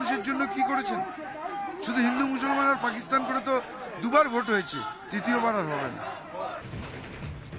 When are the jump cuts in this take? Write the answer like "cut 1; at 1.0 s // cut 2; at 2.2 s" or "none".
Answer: cut 1; at 6.7 s